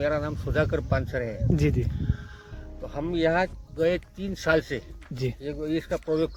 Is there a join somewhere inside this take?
no; 0 cuts

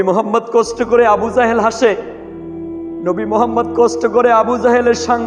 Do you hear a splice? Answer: no; 0 cuts

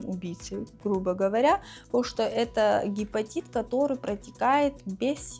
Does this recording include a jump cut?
no; 0 cuts

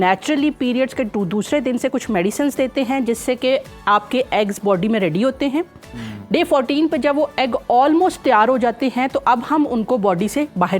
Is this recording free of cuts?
yes; 0 cuts

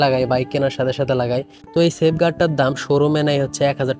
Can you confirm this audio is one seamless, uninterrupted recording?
yes; 0 cuts

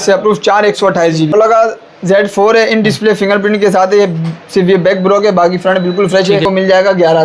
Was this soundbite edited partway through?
yes; 2 cuts; at 1.3 s, 6.4 s

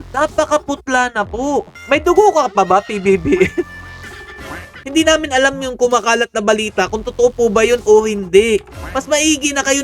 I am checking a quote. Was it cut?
yes; 2 cuts; at 1.8 s, 4.8 s

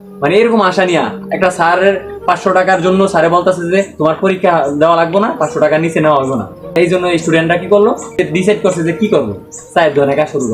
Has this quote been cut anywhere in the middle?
yes; 2 cuts; at 6.7 s, 8.2 s

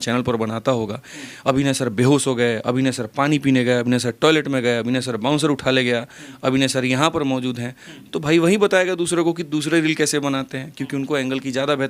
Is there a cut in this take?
no; 0 cuts

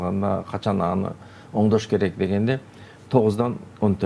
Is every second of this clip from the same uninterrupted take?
yes; 0 cuts

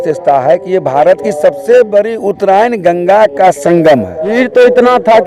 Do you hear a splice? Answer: yes; 1 cut; at 4.3 s

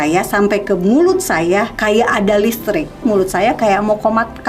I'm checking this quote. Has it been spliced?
yes; 2 cuts; at 1.7 s, 3.0 s

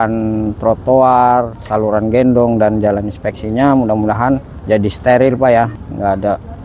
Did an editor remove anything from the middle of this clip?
yes; 3 cuts; at 1.6 s, 4.5 s, 5.7 s

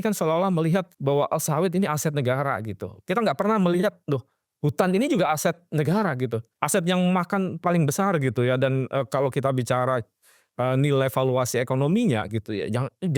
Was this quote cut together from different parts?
yes; 2 cuts; at 0.9 s, 6.5 s

